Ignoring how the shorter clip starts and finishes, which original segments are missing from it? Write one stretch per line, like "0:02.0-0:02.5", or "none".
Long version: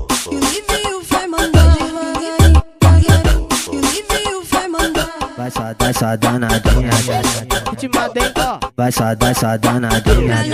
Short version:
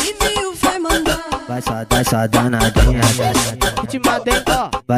0:01.5-0:04.9

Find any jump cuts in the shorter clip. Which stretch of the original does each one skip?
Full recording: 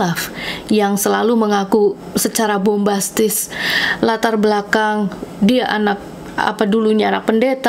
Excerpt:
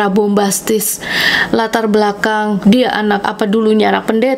0:05.1-0:05.4
0:06.0-0:06.5

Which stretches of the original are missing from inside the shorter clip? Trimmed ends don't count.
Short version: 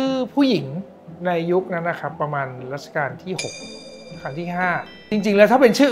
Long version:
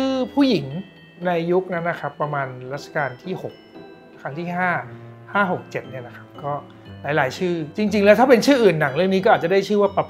0:05.0-0:07.7

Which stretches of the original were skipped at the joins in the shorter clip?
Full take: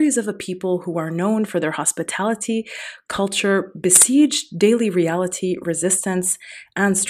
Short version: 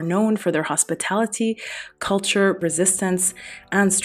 0:03.7-0:05.7

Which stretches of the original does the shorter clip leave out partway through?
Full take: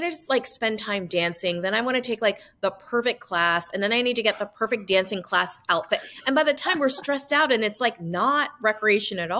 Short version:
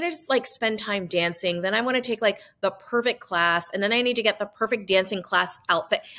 none

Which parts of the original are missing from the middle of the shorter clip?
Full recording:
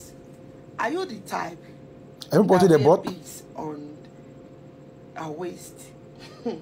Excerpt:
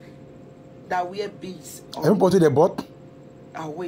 0:03.1-0:04.5

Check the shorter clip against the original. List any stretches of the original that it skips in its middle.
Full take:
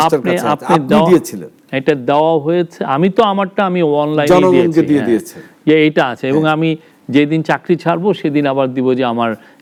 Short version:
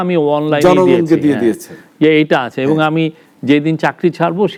none

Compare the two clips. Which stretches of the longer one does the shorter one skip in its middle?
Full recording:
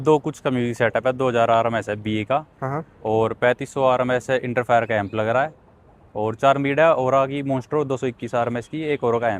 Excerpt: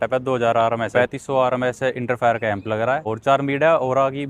0:01.8-0:03.4
0:05.5-0:06.2

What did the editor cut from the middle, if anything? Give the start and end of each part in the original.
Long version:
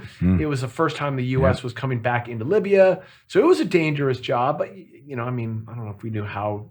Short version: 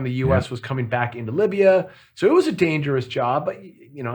none

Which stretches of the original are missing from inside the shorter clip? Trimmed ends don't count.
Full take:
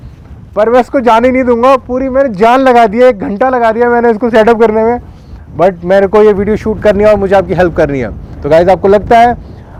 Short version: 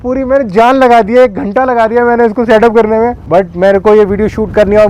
0:05.0-0:05.5

